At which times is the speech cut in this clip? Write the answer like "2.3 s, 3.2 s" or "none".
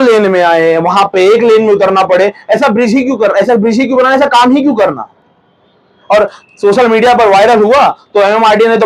none